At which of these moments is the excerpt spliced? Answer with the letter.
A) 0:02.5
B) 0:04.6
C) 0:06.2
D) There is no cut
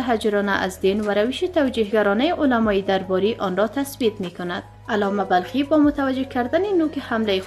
D